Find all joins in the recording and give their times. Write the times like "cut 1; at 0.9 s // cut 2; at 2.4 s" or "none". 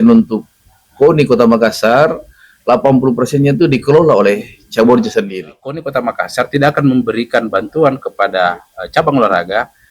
cut 1; at 5.8 s